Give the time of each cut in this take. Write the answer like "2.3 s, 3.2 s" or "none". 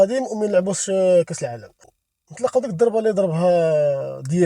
1.9 s